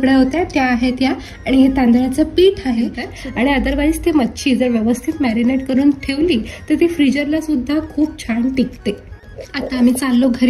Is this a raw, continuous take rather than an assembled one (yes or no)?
no